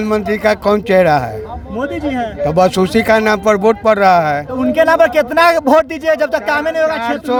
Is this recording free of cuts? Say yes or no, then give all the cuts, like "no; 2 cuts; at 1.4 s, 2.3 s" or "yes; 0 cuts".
yes; 0 cuts